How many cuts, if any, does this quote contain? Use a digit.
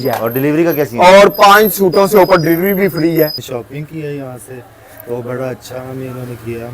1